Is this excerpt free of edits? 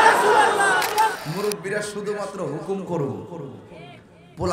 no; 1 cut; at 1.2 s

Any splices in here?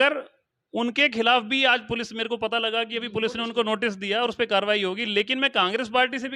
no; 0 cuts

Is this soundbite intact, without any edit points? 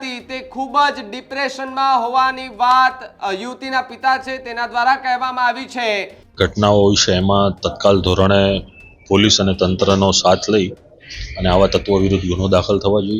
no; 1 cut; at 6.2 s

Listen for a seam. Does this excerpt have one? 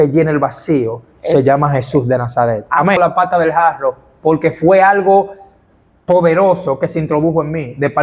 yes; 1 cut; at 3.0 s

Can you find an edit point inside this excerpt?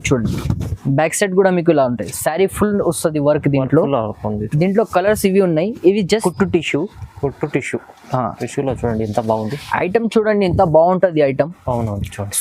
yes; 1 cut; at 6.2 s

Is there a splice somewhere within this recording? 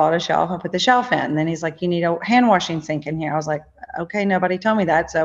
no; 0 cuts

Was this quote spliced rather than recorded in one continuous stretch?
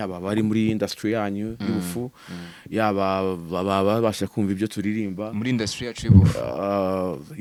no; 0 cuts

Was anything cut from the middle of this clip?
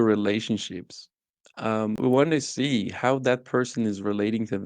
yes; 1 cut; at 2.0 s

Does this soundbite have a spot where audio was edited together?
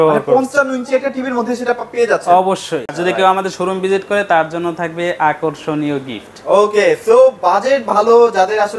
yes; 1 cut; at 3.0 s

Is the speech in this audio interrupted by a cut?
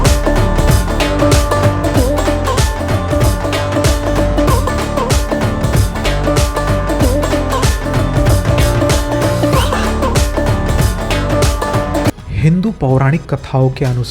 yes; 1 cut; at 12.1 s

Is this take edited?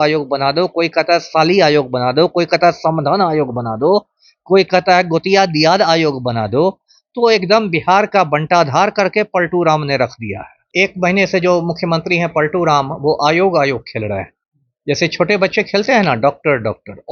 yes; 1 cut; at 10.6 s

